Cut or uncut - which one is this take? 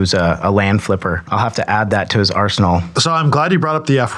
cut